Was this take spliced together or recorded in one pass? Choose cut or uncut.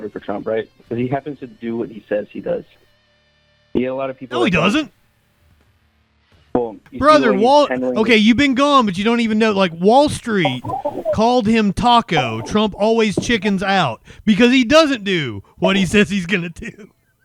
uncut